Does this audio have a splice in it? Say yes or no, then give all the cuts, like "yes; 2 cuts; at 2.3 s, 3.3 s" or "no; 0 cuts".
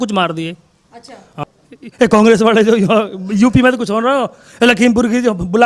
yes; 1 cut; at 1.4 s